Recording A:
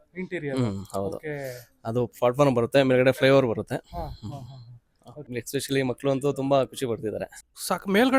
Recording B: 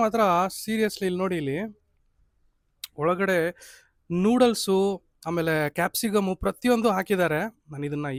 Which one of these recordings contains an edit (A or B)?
A